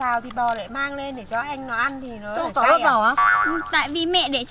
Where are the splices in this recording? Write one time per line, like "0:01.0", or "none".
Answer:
0:03.5